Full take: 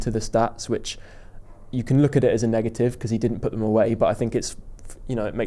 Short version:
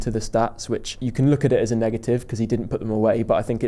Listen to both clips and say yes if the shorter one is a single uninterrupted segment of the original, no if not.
no